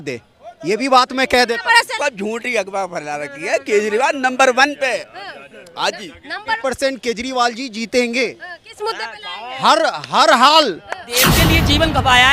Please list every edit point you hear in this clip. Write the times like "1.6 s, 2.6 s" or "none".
2.0 s, 6.6 s, 11.2 s